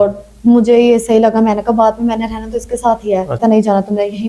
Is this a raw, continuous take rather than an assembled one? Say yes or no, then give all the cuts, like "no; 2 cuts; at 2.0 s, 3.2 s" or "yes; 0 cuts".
no; 1 cut; at 3.4 s